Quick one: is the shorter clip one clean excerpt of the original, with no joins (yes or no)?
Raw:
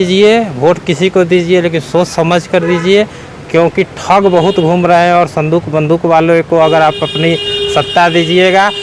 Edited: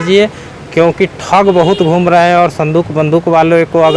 yes